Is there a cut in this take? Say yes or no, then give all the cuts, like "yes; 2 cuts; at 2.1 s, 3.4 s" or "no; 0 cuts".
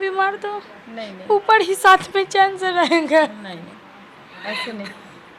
no; 0 cuts